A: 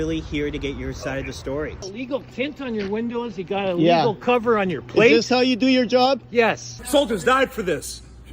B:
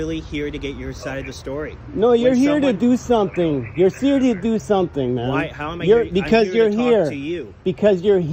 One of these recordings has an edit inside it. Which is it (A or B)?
A